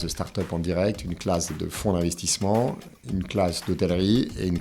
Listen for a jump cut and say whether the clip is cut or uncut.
cut